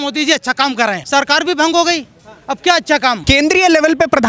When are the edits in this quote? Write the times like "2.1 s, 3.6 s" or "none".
1.0 s, 3.2 s